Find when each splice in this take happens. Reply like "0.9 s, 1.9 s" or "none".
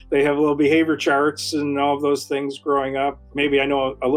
3.2 s